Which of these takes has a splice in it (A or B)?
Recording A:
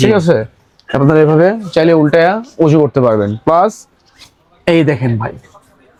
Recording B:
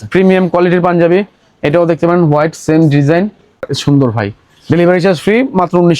B